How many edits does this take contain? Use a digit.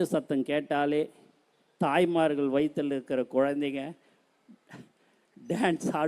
0